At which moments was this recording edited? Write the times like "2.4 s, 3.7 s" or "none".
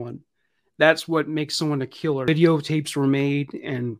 2.3 s

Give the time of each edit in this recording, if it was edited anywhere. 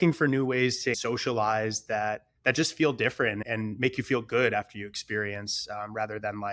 1.0 s, 2.3 s, 3.4 s

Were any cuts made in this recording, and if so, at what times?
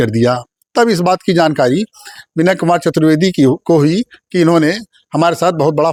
none

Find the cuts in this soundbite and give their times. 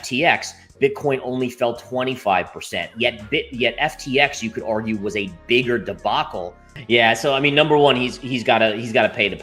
6.7 s

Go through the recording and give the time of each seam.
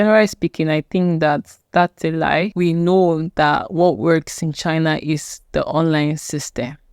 2.5 s

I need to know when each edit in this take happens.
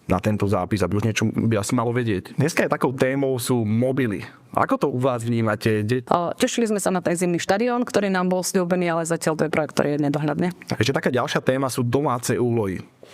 2.3 s, 6.0 s, 10.6 s

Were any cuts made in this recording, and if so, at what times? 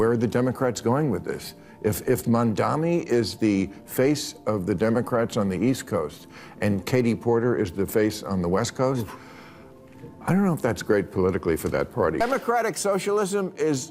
12.2 s

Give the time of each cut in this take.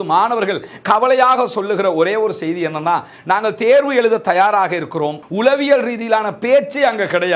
5.2 s

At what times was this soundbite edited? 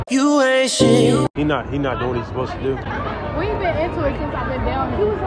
1.3 s

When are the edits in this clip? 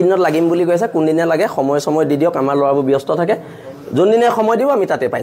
none

